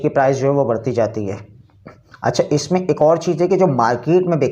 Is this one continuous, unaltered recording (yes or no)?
yes